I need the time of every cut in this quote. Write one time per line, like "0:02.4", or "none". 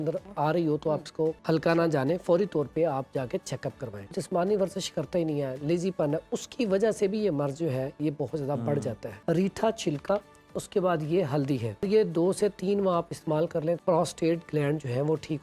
0:01.4
0:04.1
0:09.1
0:11.8
0:13.8

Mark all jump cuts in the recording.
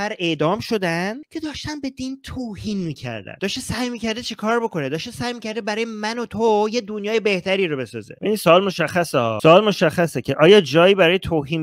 0:03.4
0:08.1

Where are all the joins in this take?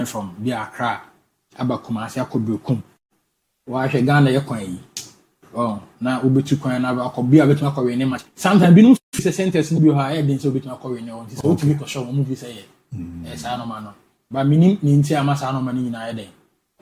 none

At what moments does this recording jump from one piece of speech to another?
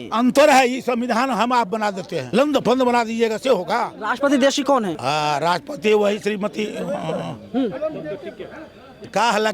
0:02.1
0:04.0
0:05.0

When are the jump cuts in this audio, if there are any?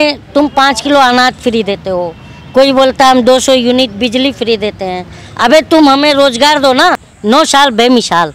0:07.1

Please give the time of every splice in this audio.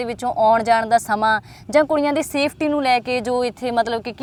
none

